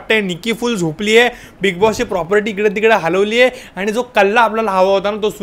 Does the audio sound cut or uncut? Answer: uncut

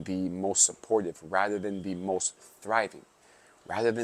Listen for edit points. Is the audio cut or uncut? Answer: uncut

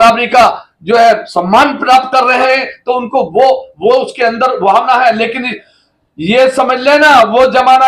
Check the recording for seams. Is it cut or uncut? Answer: cut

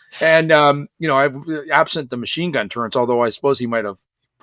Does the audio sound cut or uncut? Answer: uncut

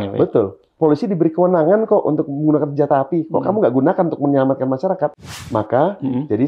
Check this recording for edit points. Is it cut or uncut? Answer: cut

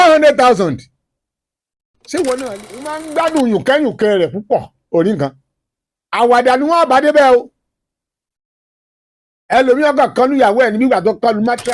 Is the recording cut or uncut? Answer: cut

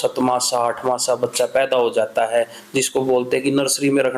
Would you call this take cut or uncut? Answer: uncut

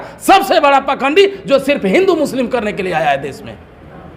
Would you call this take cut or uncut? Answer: uncut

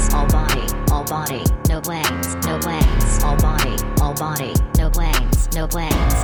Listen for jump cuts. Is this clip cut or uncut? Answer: uncut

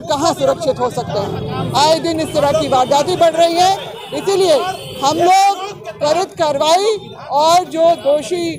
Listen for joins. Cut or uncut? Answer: uncut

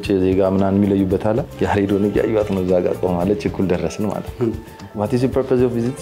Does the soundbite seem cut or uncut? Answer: cut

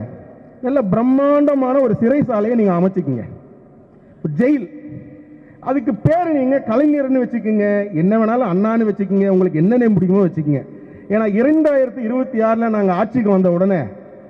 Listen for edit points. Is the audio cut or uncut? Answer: uncut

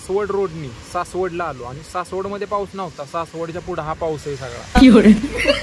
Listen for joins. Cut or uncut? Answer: cut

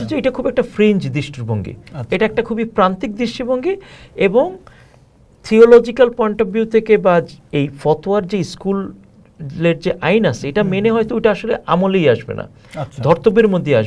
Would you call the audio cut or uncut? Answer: uncut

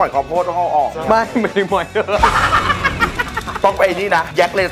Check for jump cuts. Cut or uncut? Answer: cut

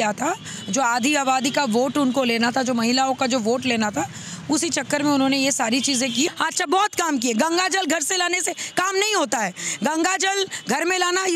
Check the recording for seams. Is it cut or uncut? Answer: cut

